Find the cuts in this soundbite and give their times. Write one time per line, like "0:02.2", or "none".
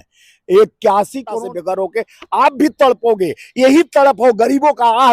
0:01.4